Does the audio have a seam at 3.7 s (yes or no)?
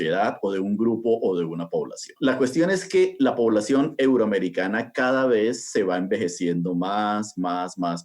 no